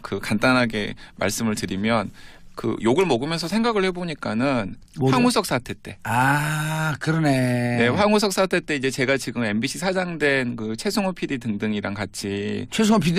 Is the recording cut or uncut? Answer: uncut